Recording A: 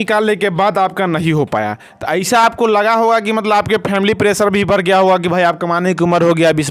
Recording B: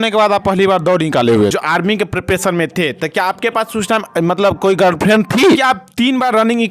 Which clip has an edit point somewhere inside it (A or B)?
B